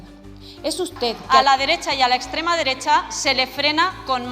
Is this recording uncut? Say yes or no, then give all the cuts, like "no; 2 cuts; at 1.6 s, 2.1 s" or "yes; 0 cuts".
no; 1 cut; at 1.2 s